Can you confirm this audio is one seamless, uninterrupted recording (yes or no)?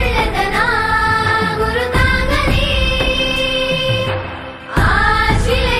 yes